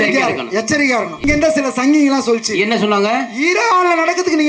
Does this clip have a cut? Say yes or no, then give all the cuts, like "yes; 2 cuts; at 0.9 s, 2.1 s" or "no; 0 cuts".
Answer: yes; 1 cut; at 1.1 s